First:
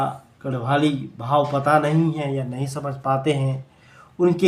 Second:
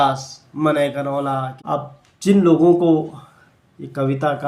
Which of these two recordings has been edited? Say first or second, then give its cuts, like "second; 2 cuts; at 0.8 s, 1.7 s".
second; 1 cut; at 1.6 s